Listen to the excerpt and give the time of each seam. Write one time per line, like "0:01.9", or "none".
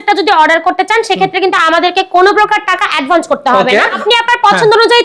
0:04.0